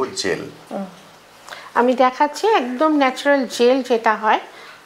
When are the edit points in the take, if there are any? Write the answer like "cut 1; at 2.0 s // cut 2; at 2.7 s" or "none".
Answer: none